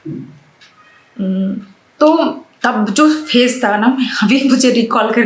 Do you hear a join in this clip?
no; 0 cuts

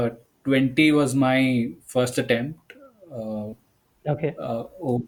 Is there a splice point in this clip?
no; 0 cuts

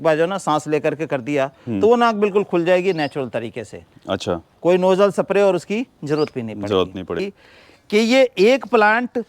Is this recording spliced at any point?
yes; 1 cut; at 7.2 s

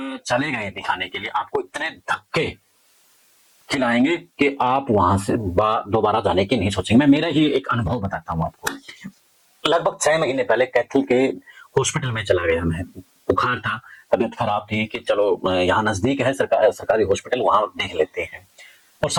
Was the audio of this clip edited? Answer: no; 0 cuts

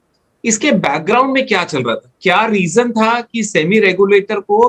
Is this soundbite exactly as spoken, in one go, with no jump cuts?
yes; 0 cuts

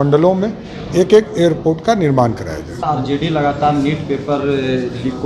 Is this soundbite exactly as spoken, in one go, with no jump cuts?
no; 1 cut; at 2.7 s

